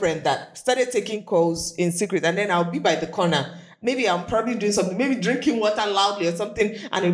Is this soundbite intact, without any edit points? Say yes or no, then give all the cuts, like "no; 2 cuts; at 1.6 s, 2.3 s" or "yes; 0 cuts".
yes; 0 cuts